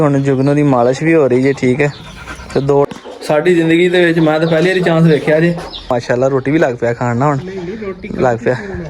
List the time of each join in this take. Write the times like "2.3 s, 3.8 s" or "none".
2.9 s, 5.9 s